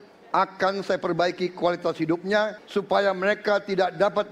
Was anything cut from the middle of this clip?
yes; 1 cut; at 2.6 s

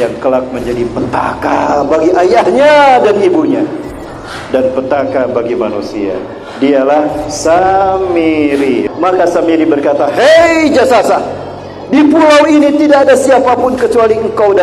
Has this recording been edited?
yes; 1 cut; at 8.8 s

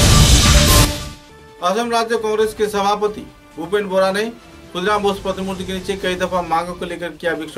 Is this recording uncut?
yes; 0 cuts

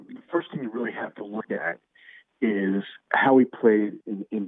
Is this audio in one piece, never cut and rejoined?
yes; 0 cuts

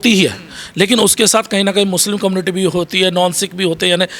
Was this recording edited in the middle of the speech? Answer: no; 0 cuts

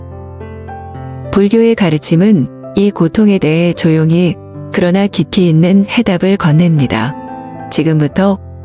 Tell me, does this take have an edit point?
no; 0 cuts

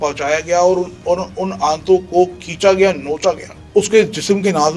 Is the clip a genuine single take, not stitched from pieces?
no; 1 cut; at 3.5 s

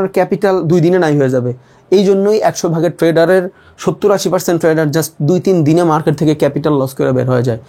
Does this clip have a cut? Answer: no; 0 cuts

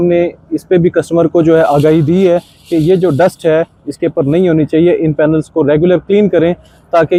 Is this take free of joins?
yes; 0 cuts

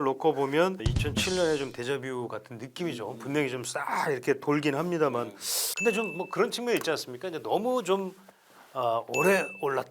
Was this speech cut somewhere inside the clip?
yes; 2 cuts; at 1.0 s, 5.7 s

